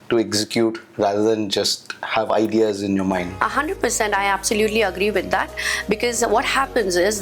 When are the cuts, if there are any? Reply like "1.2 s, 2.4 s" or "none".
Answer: none